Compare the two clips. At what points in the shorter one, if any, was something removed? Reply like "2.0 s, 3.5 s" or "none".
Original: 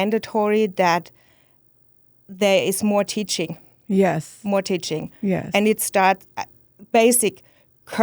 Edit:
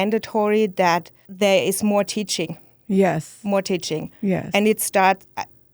1.2 s